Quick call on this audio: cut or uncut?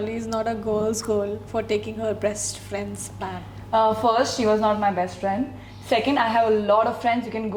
uncut